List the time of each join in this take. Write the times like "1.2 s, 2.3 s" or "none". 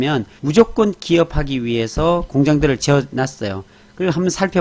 none